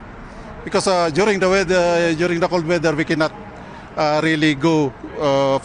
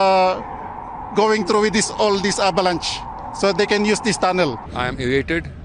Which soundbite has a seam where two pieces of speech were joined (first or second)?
second